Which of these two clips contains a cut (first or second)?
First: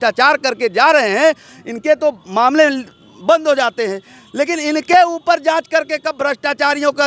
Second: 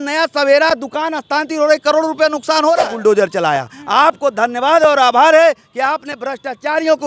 second